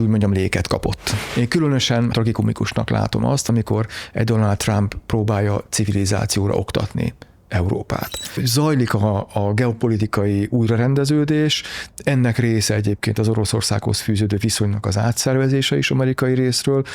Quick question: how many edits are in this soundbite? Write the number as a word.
three